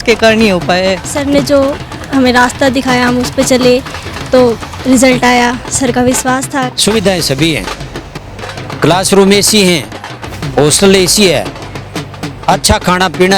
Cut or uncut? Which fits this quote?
cut